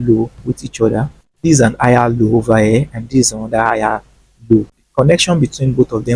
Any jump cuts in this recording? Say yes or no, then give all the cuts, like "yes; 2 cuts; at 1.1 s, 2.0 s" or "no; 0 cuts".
yes; 1 cut; at 4.8 s